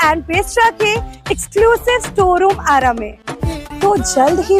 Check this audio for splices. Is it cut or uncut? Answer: cut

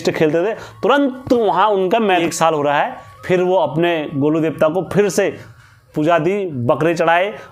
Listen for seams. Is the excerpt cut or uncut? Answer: cut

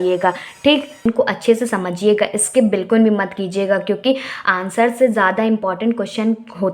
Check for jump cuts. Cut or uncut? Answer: cut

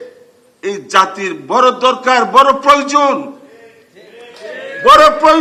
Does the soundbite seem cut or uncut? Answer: uncut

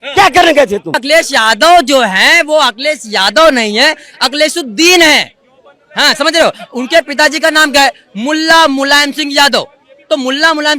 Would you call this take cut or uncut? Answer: cut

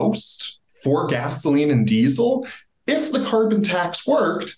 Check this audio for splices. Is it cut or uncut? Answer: uncut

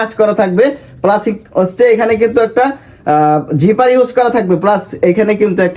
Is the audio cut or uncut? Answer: uncut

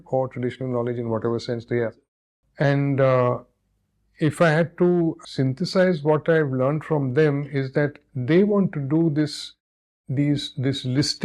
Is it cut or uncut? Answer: cut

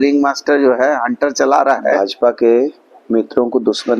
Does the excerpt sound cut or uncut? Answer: cut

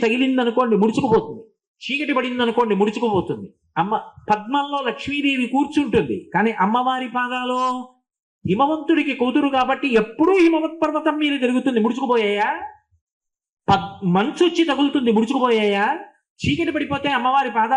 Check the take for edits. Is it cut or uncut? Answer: uncut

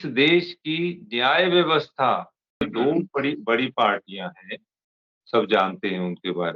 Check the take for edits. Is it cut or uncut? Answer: cut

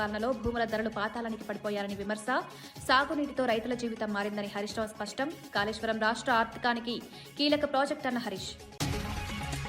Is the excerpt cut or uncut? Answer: cut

